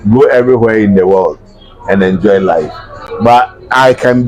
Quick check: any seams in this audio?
no; 0 cuts

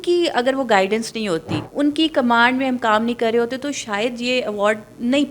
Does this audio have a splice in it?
yes; 1 cut; at 1.6 s

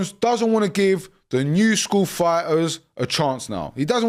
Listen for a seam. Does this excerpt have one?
no; 0 cuts

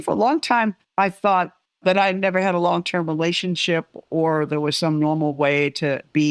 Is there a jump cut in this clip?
yes; 2 cuts; at 0.8 s, 1.6 s

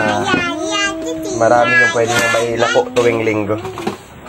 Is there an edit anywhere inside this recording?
no; 0 cuts

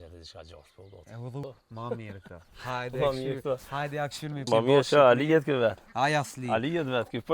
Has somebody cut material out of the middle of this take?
yes; 2 cuts; at 1.4 s, 4.4 s

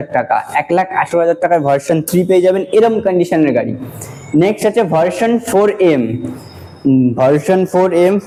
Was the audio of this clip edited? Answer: no; 0 cuts

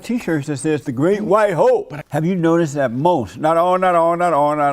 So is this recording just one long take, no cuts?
no; 1 cut; at 2.0 s

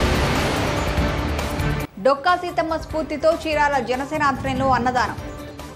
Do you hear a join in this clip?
yes; 1 cut; at 1.7 s

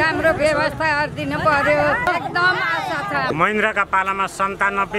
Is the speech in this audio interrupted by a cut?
yes; 2 cuts; at 2.1 s, 3.3 s

